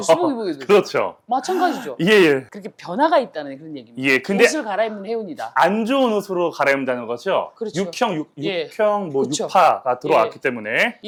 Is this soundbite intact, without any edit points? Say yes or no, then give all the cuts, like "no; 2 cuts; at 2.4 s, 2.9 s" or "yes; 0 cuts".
yes; 0 cuts